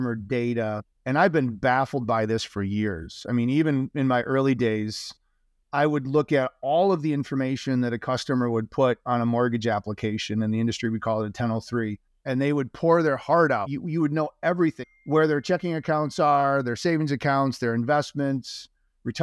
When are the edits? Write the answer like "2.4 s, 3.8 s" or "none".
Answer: 12.1 s, 13.7 s, 14.8 s